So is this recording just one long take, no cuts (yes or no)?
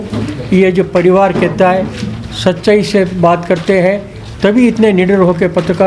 yes